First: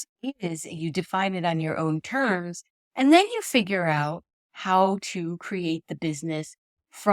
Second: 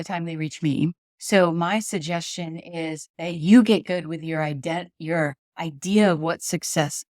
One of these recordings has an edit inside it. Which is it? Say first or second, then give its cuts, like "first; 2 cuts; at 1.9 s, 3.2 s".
second; 2 cuts; at 1.1 s, 3.1 s